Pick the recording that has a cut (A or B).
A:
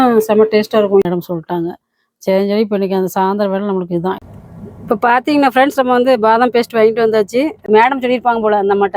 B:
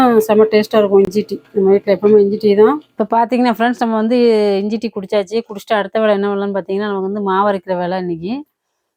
A